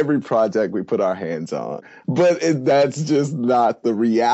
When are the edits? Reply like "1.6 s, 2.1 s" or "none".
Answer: 1.9 s